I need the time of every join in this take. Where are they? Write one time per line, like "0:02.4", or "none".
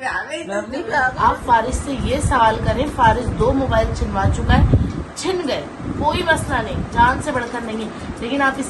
0:01.1